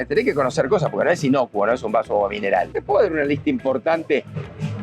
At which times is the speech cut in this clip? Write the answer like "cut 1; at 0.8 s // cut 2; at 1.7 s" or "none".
cut 1; at 2.8 s